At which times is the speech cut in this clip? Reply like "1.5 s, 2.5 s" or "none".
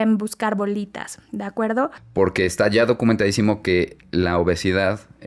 2.0 s